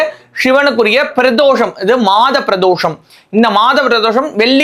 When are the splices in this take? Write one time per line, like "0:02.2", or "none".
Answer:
none